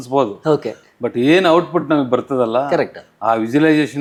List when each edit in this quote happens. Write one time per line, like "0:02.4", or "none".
none